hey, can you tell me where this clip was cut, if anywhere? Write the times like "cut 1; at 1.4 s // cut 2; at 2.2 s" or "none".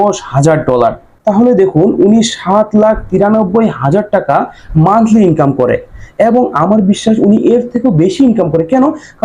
cut 1; at 1.1 s